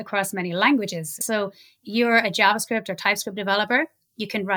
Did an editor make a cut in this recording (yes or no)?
yes